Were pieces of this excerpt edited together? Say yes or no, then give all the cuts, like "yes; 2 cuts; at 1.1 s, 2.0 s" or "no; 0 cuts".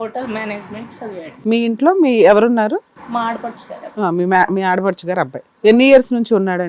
yes; 3 cuts; at 1.3 s, 3.0 s, 5.4 s